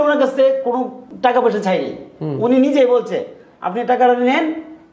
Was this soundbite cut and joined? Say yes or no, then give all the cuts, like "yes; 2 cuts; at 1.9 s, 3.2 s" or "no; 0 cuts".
yes; 1 cut; at 1.0 s